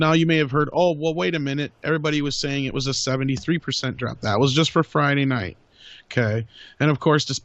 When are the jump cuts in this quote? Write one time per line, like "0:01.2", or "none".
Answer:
0:01.0